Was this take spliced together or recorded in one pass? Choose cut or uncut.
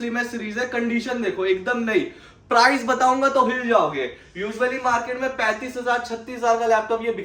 uncut